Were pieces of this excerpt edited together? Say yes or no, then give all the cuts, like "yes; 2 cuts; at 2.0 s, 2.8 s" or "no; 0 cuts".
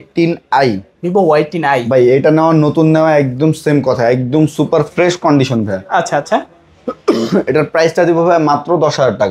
no; 0 cuts